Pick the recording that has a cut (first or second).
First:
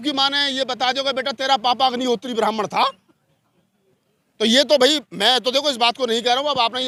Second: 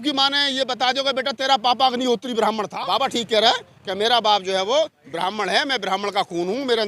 second